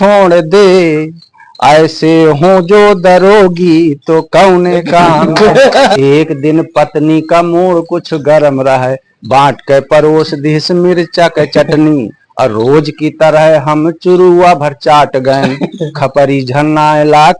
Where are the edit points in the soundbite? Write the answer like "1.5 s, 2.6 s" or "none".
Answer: 5.9 s